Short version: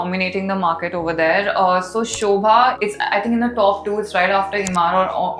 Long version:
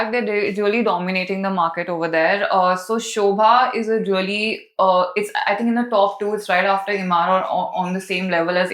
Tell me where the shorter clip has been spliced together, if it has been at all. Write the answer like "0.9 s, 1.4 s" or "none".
2.8 s

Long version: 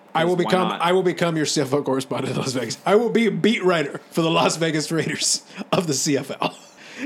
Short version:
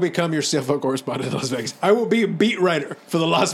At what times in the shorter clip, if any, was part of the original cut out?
none

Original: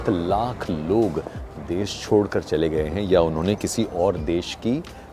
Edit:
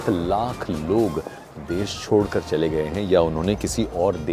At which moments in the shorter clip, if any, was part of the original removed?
none

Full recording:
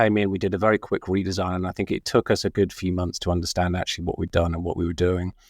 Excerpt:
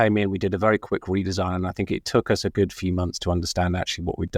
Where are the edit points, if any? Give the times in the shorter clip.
none

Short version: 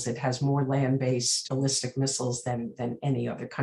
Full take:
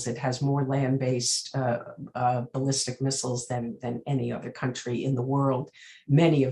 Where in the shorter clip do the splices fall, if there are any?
1.4 s

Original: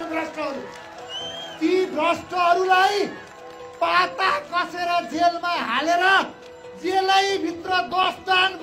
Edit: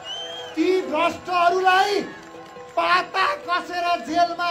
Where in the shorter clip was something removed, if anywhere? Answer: none

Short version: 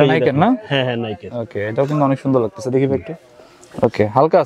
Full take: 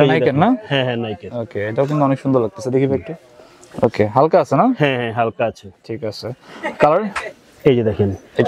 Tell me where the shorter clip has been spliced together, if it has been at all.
none

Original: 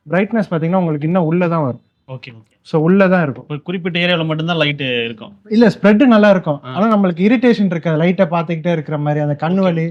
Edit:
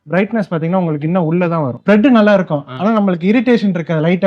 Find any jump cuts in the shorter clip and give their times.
1.8 s

